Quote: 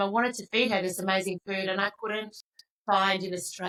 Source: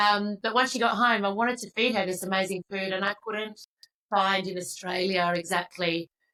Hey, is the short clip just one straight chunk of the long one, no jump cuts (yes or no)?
yes